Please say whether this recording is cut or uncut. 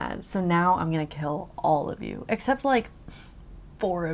uncut